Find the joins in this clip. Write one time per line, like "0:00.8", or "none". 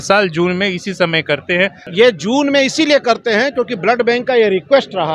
0:01.8